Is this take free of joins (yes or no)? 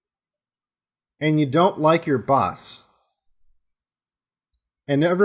yes